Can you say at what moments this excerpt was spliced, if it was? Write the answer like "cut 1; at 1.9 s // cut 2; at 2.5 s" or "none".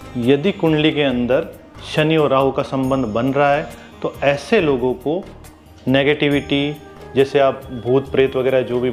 none